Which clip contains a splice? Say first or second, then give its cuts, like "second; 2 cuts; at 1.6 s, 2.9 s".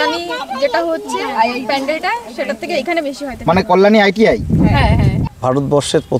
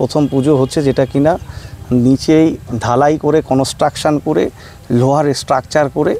first; 1 cut; at 5.2 s